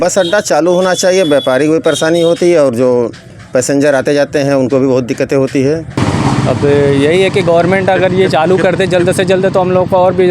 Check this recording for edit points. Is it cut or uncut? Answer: cut